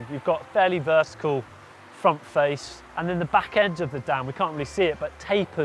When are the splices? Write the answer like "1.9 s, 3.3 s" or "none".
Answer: none